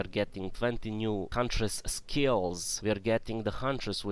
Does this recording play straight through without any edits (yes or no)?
no